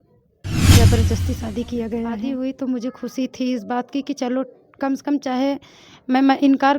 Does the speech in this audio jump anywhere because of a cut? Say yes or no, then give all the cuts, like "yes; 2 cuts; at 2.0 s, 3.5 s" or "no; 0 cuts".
yes; 1 cut; at 2.3 s